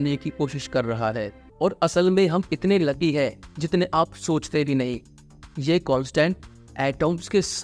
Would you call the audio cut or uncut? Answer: cut